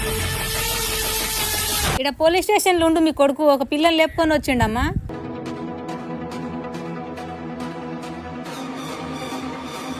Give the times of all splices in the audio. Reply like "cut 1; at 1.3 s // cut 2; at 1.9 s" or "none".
cut 1; at 2.0 s

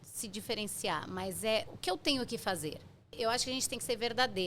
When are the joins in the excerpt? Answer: cut 1; at 1.7 s // cut 2; at 3.1 s

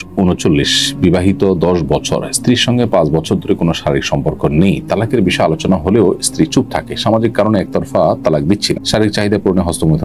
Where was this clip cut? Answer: none

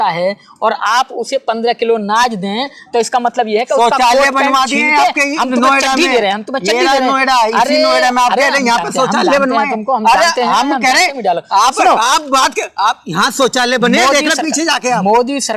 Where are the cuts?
none

